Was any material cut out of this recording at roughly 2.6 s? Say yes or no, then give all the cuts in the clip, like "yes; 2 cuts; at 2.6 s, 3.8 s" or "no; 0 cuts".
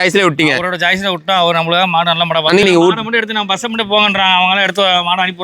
yes; 1 cut; at 2.6 s